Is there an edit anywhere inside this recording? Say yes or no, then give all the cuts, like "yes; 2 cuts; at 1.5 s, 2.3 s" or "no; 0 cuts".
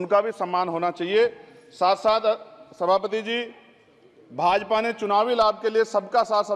no; 0 cuts